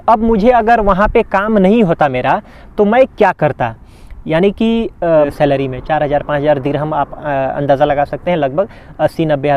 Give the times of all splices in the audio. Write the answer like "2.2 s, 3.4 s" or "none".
5.1 s